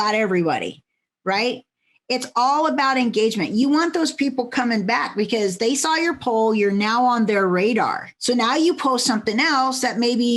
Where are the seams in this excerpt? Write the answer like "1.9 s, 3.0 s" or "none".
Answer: 8.1 s